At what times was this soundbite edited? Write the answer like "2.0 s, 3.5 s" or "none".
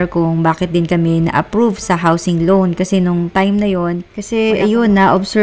4.1 s